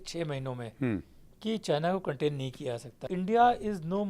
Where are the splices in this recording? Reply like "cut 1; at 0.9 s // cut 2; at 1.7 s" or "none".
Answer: cut 1; at 3.1 s